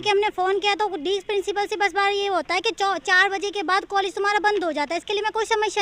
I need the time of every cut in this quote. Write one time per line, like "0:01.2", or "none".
none